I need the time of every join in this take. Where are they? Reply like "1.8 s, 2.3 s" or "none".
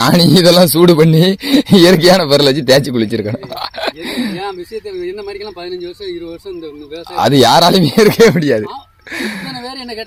none

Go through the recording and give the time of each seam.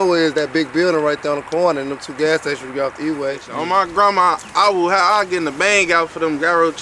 3.5 s

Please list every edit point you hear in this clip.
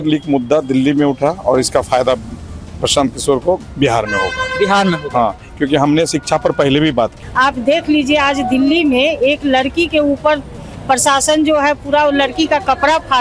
7.2 s

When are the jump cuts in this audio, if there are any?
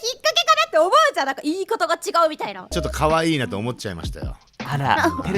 2.6 s

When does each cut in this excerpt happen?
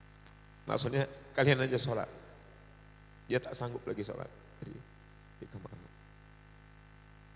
none

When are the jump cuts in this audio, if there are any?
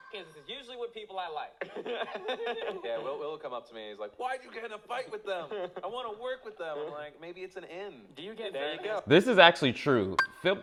none

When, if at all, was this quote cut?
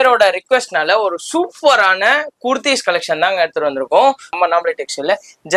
4.4 s

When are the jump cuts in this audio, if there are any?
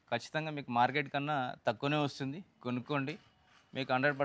none

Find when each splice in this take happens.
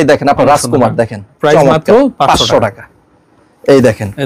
none

